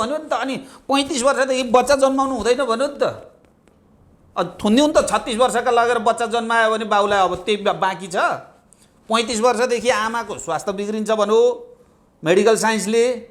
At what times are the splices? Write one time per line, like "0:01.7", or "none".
none